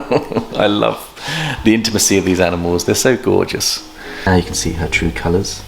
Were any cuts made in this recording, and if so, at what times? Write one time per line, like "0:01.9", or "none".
0:04.2